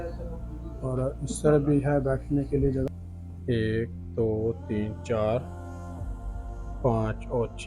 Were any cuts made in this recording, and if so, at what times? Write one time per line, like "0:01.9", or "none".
0:02.9